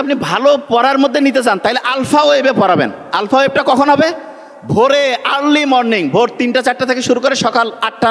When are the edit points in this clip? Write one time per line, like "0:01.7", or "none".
none